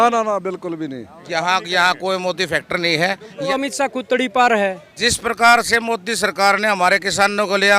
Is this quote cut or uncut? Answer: cut